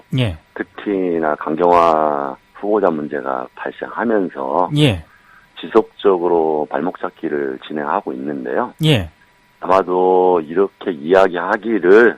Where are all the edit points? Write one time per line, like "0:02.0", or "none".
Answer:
none